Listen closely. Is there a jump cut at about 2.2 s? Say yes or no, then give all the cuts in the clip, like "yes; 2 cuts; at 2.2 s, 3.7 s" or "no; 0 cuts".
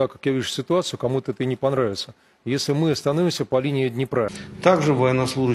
no; 1 cut; at 4.4 s